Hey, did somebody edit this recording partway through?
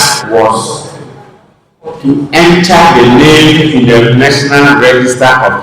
no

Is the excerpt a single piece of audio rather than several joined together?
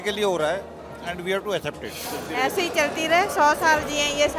no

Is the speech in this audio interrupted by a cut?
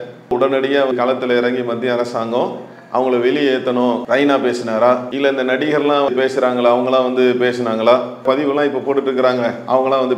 yes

